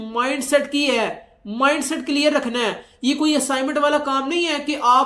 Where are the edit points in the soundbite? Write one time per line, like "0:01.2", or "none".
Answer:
none